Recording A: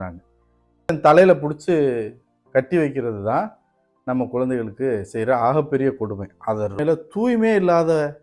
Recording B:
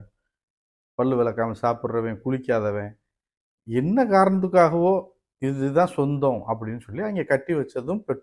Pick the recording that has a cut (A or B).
A